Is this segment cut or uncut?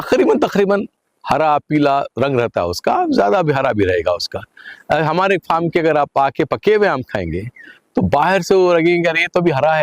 uncut